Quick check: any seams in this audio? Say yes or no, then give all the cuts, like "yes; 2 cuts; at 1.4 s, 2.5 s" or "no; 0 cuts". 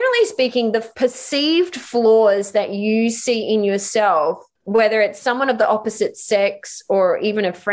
yes; 2 cuts; at 0.9 s, 4.5 s